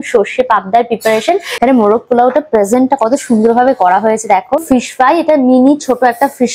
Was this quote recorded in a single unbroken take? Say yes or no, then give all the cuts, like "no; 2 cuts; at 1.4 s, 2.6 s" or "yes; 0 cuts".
no; 2 cuts; at 1.5 s, 4.6 s